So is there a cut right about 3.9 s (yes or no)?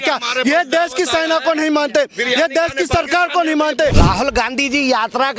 yes